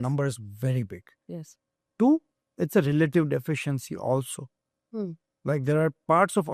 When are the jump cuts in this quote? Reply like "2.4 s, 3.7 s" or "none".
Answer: 2.4 s